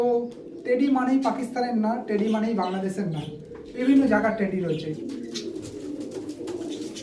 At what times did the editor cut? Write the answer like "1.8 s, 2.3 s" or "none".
5.0 s